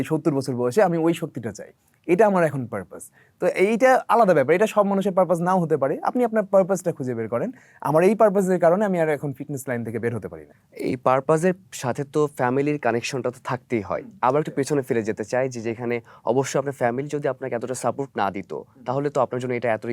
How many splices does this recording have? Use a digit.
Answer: 0